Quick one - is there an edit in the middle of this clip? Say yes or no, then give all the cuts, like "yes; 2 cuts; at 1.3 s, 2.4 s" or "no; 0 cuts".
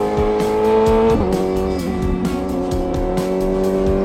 no; 0 cuts